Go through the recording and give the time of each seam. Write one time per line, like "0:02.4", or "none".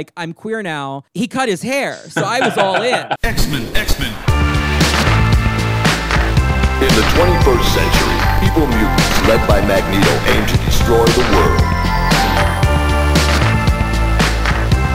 0:03.2